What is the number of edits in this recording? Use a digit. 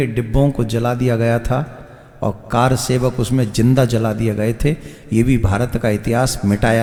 0